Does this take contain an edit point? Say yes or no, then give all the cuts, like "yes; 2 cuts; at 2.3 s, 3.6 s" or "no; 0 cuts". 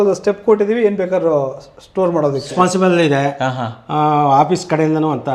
yes; 1 cut; at 2.5 s